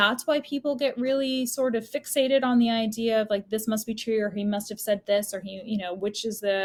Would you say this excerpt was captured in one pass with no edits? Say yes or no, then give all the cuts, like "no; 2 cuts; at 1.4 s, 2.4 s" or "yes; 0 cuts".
yes; 0 cuts